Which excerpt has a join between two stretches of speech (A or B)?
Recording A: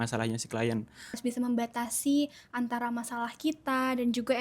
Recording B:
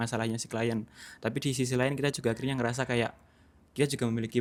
A